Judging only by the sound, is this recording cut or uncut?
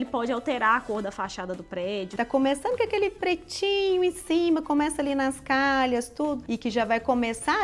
cut